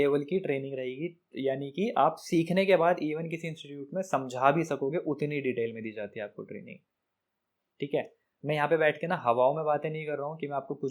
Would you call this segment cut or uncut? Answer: uncut